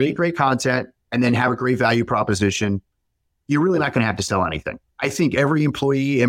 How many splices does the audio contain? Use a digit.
1